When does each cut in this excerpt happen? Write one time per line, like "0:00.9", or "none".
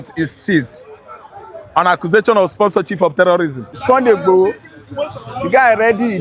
0:03.9